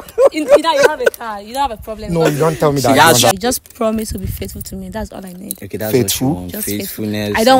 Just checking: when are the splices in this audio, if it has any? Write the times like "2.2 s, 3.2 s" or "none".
3.3 s